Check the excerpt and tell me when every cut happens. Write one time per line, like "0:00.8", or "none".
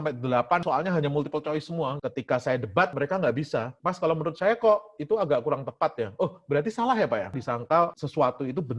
0:02.0
0:03.7
0:07.7